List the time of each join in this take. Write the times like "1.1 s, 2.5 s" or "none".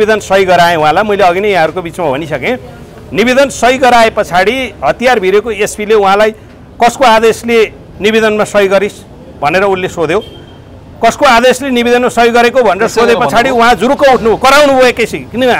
none